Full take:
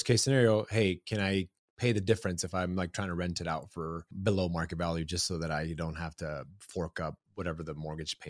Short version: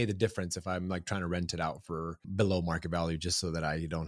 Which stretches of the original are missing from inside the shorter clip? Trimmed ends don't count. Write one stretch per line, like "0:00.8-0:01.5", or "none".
none